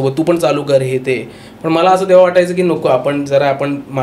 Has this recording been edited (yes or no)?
no